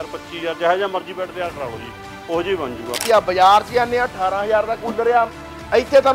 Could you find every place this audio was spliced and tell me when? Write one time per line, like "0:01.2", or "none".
0:03.0